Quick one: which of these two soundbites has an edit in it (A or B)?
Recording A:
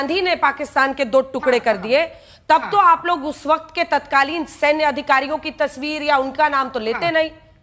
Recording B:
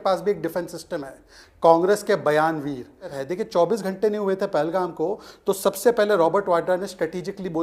B